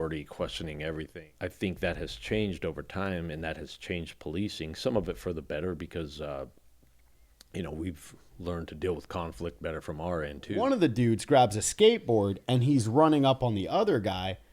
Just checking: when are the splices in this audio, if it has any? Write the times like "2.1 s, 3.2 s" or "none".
1.2 s, 10.6 s